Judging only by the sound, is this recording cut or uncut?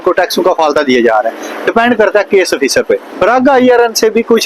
cut